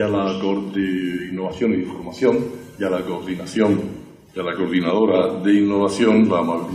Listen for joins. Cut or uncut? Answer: cut